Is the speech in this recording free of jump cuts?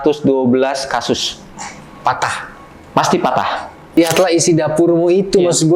no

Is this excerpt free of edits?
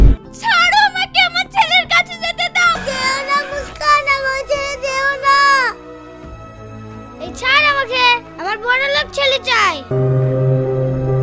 no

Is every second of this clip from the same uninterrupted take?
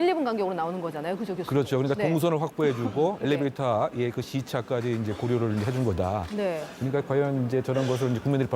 yes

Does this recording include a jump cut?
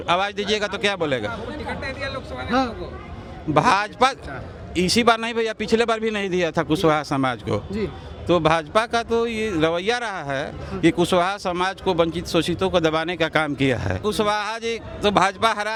no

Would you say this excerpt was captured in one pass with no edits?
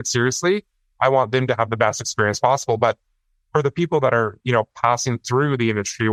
yes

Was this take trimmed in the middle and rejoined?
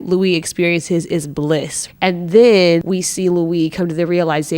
yes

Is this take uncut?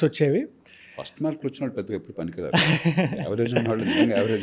yes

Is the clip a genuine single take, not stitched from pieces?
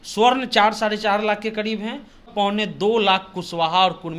no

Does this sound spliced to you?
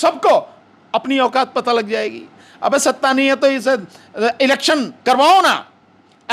yes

